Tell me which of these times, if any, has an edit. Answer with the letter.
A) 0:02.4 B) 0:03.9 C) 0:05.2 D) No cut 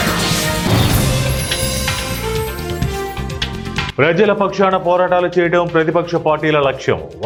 D